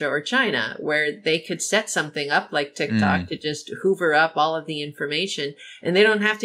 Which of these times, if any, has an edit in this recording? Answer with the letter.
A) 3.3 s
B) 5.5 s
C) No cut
C